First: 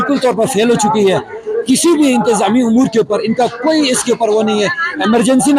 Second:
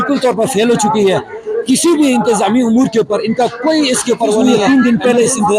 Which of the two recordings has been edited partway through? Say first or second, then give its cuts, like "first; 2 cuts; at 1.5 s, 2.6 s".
second; 1 cut; at 4.4 s